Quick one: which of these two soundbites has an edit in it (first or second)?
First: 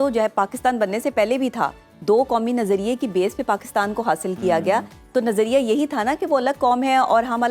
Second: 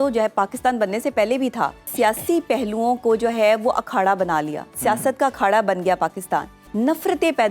second